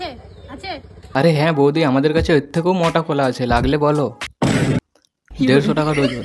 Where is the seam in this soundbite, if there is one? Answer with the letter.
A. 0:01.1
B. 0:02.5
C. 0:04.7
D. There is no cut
A